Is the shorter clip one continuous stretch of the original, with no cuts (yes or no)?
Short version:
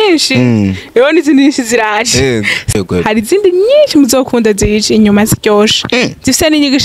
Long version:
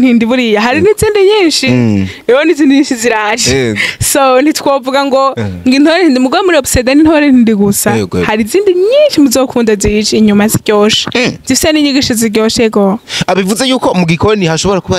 no